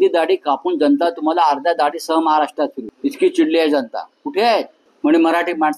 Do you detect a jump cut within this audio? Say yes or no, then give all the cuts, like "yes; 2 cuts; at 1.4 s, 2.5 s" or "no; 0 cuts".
yes; 2 cuts; at 2.9 s, 4.8 s